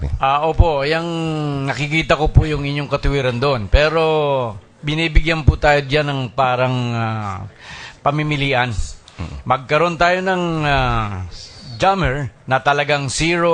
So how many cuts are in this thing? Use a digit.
0